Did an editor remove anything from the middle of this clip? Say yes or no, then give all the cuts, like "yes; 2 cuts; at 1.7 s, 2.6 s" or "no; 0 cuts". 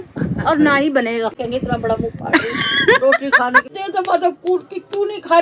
yes; 3 cuts; at 1.4 s, 2.7 s, 3.7 s